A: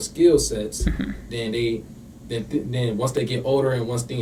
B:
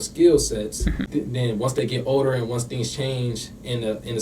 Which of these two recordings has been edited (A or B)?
B